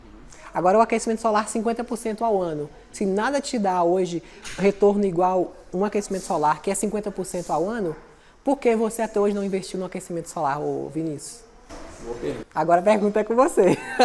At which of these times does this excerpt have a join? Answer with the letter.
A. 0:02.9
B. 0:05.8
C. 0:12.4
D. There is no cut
C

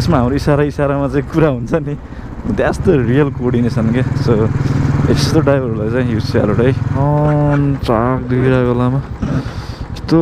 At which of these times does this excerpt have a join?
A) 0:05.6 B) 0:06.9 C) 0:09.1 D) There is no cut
B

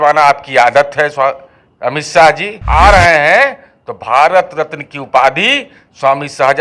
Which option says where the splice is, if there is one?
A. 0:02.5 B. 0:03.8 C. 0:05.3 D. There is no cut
A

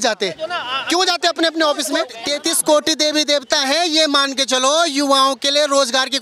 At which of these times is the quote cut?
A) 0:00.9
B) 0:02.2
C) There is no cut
B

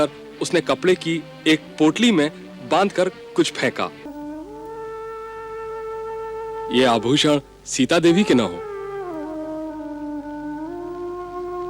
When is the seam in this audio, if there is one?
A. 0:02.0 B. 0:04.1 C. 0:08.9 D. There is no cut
B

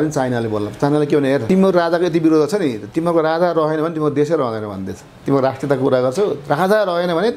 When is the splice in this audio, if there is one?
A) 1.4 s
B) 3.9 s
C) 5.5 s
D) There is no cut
A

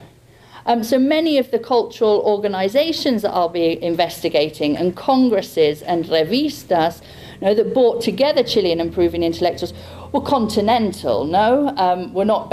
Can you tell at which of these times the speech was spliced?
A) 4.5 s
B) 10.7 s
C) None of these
A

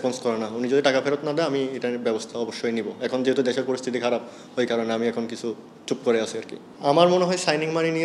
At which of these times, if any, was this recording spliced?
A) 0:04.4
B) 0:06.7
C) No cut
B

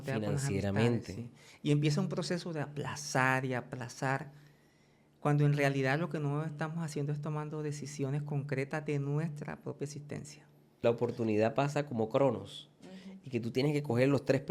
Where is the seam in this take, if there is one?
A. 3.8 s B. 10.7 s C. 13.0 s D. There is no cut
B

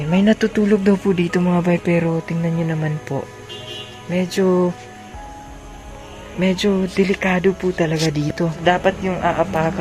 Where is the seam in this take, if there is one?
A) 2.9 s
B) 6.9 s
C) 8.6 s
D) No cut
C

